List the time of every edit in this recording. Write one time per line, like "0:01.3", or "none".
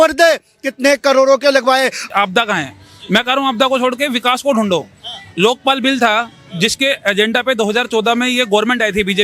0:02.0